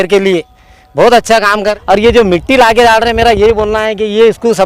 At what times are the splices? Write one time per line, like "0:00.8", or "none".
0:01.7